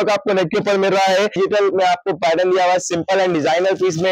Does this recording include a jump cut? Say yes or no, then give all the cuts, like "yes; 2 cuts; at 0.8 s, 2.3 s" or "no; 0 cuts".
yes; 1 cut; at 1.4 s